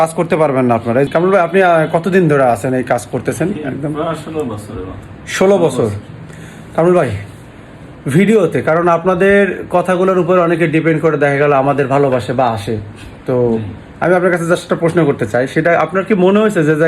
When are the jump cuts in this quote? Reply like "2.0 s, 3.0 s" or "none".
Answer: 1.1 s